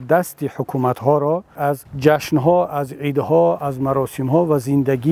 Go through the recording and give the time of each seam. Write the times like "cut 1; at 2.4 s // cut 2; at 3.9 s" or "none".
cut 1; at 1.6 s